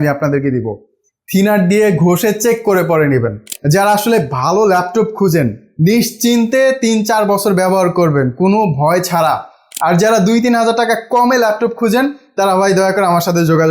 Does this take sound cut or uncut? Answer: cut